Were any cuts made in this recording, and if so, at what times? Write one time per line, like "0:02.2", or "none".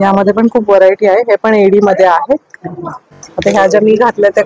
0:03.2

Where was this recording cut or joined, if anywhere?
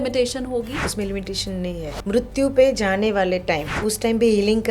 0:00.8
0:02.0
0:03.7

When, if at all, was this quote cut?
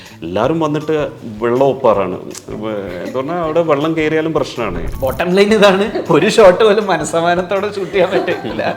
0:04.9

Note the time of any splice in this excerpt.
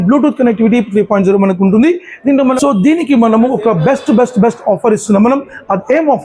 0:02.6

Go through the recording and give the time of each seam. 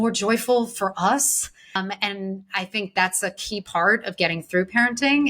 0:01.8

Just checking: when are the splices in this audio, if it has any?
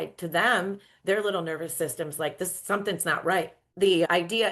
0:03.6

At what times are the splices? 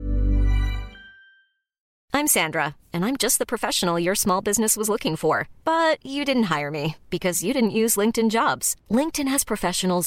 0:01.9

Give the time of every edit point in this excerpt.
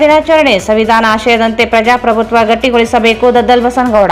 none

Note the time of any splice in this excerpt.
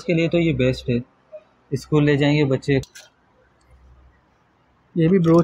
0:02.9

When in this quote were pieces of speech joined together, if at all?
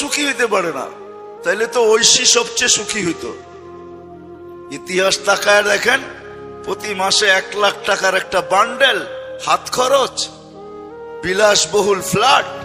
0:03.3
0:04.8

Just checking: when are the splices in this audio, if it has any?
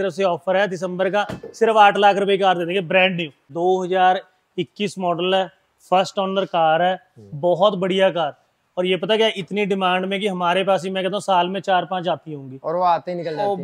0:03.5

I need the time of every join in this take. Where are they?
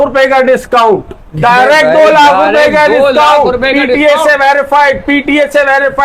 none

